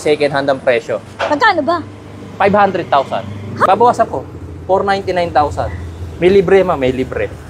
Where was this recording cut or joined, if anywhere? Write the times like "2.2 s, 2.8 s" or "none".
3.6 s